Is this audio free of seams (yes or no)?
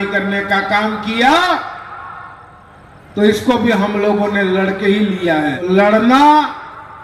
no